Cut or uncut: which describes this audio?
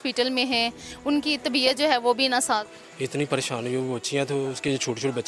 cut